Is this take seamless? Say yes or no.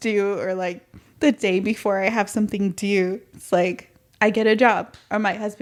yes